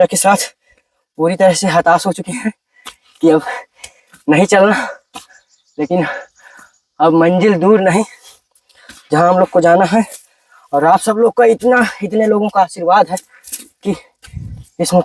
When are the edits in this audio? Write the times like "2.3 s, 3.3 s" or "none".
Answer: none